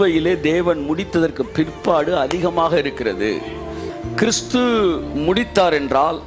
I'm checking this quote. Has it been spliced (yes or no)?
yes